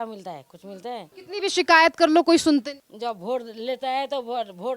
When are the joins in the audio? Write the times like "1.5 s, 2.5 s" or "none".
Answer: 1.2 s, 2.8 s